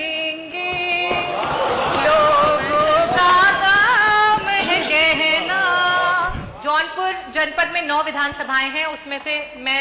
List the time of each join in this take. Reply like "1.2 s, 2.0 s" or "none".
6.4 s